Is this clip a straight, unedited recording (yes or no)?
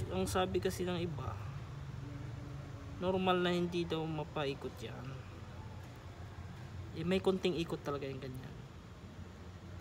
yes